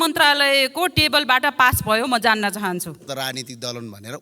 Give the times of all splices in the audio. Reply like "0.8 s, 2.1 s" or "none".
3.1 s